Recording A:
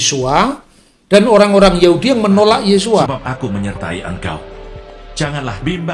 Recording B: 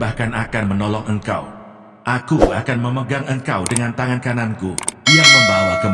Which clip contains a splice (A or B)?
A